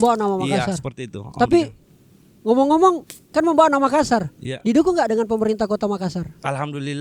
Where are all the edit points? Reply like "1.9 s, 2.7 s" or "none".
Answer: none